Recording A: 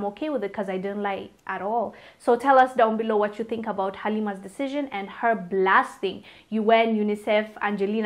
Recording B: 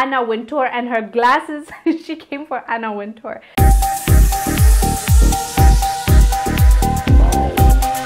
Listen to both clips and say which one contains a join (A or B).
B